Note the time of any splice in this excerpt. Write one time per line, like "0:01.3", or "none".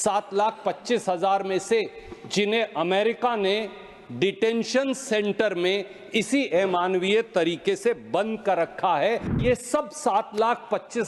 0:09.4